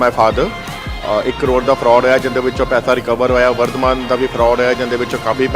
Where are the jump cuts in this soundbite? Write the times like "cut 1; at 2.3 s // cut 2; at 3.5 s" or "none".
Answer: none

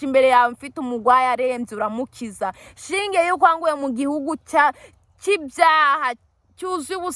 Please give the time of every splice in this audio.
none

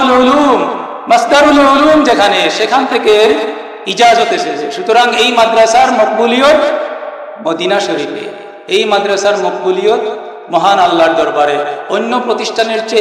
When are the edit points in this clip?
none

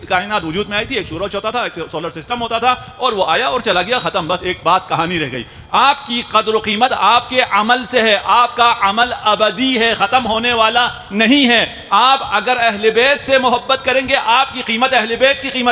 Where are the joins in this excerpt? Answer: none

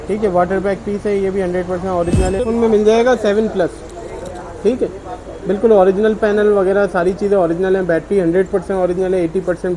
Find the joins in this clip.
cut 1; at 2.4 s

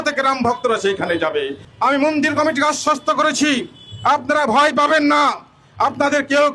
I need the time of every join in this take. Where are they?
cut 1; at 1.6 s

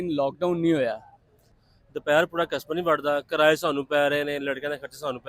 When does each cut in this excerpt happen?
cut 1; at 1.6 s

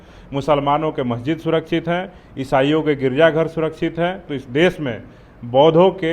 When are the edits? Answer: cut 1; at 4.3 s

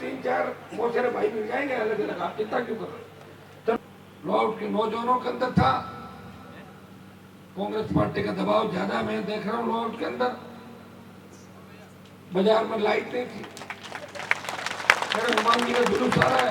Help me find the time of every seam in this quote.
cut 1; at 3.8 s

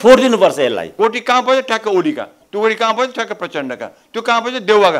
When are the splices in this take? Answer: cut 1; at 0.9 s

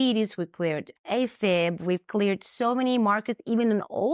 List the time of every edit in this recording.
cut 1; at 0.9 s

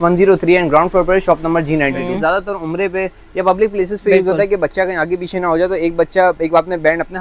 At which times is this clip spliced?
cut 1; at 2.1 s

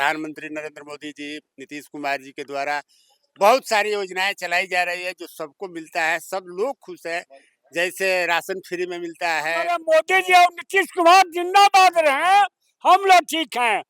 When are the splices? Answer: cut 1; at 9.8 s

